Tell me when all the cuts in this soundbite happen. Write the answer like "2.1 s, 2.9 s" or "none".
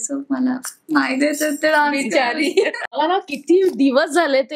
2.8 s